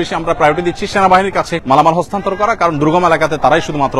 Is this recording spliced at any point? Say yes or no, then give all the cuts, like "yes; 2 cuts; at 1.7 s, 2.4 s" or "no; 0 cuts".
yes; 1 cut; at 1.6 s